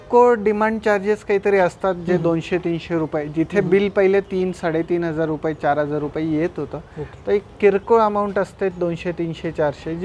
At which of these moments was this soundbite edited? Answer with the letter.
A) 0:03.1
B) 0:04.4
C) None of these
C